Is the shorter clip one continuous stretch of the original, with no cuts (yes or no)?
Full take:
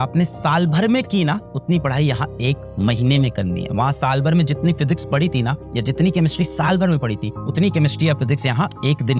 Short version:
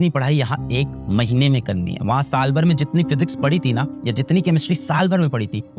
yes